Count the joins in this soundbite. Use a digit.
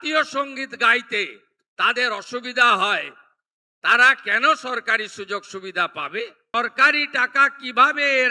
1